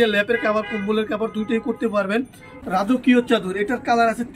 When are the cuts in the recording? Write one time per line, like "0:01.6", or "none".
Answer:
0:02.4